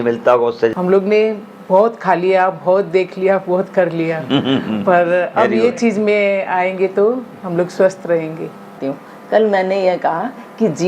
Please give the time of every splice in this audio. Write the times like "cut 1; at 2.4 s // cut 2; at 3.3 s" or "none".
cut 1; at 0.7 s // cut 2; at 8.9 s